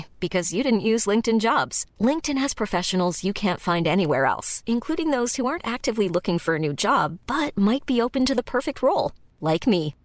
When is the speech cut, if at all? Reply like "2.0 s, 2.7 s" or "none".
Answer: none

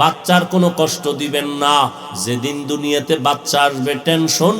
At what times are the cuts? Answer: 2.1 s

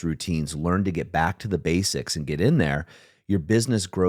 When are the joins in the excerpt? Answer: none

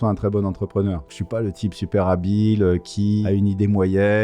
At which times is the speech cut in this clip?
1.1 s, 3.2 s

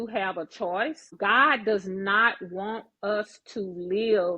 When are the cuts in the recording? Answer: 1.1 s

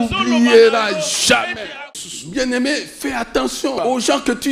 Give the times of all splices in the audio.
1.8 s, 3.8 s

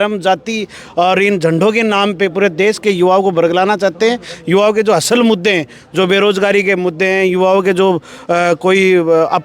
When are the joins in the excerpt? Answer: none

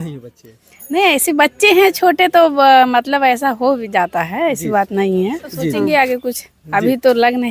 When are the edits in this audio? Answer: 5.8 s

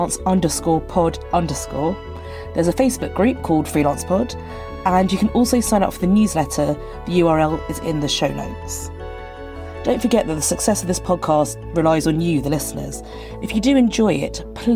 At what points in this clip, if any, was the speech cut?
8.5 s, 9.8 s

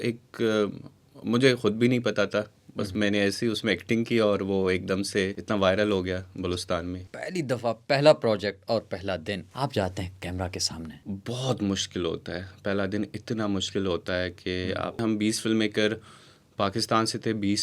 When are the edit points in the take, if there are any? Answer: 5.4 s, 7.1 s, 9.5 s, 11.0 s, 15.0 s

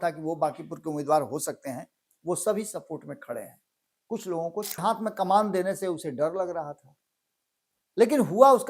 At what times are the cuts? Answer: 4.8 s

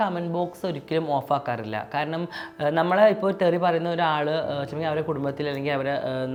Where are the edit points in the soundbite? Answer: none

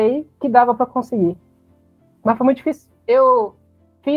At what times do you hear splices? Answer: none

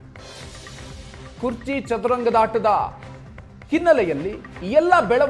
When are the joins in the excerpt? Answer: 1.3 s

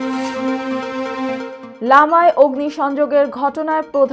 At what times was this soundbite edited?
1.6 s

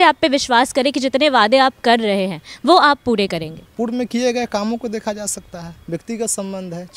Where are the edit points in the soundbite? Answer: 3.6 s

